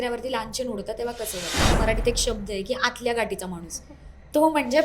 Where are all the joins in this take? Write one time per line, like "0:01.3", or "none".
0:01.7

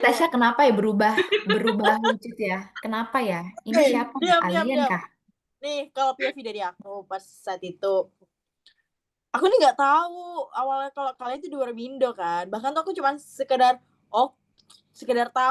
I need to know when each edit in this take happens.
none

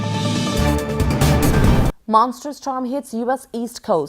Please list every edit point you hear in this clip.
none

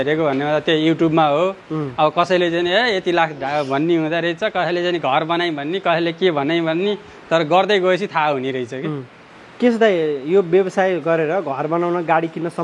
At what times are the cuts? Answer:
none

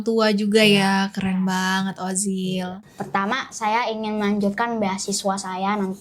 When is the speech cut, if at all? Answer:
0:02.8

